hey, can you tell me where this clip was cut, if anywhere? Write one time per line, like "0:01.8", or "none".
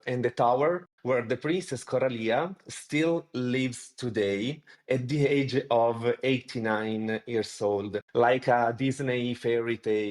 none

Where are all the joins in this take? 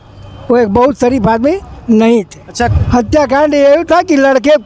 0:02.7

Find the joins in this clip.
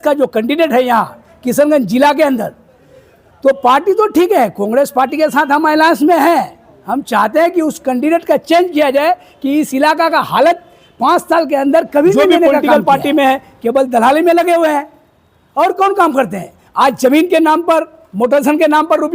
0:12.5

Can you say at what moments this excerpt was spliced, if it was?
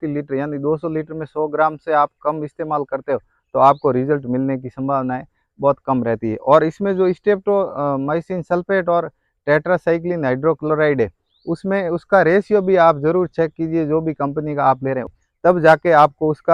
0:15.2

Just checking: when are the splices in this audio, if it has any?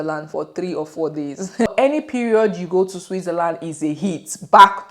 0:01.7

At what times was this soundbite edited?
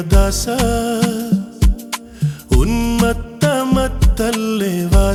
none

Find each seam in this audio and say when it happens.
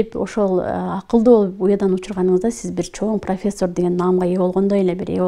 none

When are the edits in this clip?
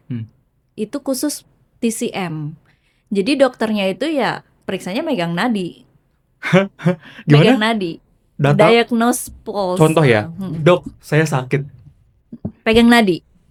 none

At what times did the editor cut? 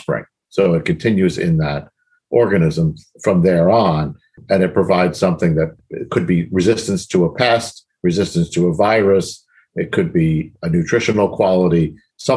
0:04.3
0:05.8
0:10.5

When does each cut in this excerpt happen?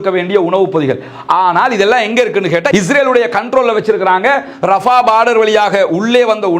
0:02.7

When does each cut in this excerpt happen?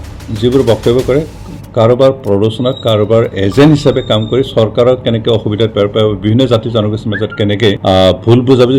0:07.8

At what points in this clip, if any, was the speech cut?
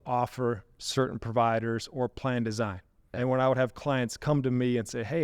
0:03.1

